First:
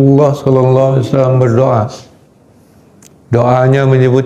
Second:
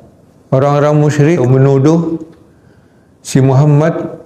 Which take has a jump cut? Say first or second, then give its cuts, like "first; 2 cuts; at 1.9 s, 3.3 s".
second; 1 cut; at 1.4 s